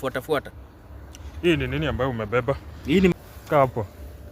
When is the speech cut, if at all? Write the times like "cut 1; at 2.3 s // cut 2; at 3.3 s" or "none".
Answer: cut 1; at 3.1 s